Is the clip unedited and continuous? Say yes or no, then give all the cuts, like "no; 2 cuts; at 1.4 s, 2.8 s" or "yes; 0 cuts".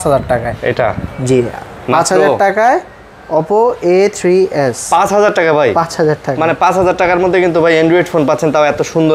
yes; 0 cuts